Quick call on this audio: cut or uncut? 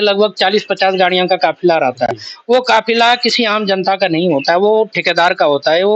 uncut